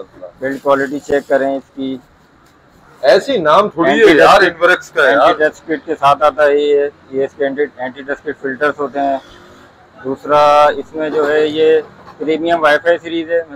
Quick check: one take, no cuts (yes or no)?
yes